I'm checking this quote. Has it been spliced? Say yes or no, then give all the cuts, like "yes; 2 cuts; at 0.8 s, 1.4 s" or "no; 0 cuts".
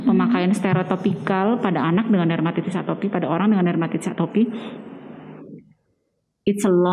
no; 0 cuts